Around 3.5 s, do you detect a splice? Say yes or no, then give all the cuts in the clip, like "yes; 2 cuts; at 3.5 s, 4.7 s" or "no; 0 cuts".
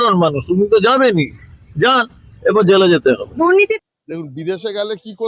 yes; 1 cut; at 3.5 s